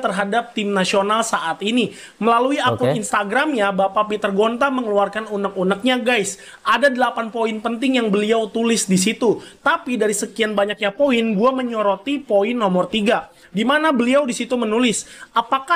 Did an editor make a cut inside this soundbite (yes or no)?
no